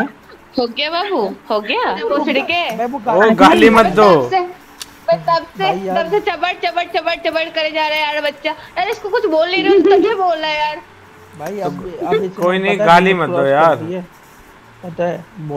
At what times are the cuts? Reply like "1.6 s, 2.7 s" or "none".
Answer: 2.0 s